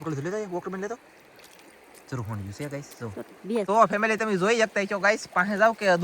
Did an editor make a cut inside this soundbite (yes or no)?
yes